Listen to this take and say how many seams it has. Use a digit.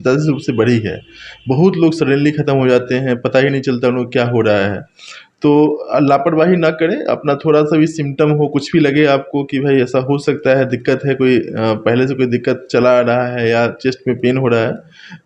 0